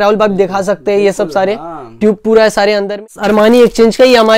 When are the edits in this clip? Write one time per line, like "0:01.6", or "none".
0:03.2